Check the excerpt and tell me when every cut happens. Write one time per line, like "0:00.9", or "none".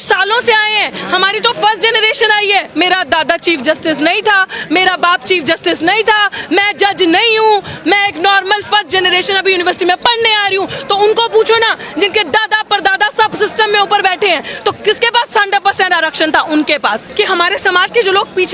0:02.7
0:17.0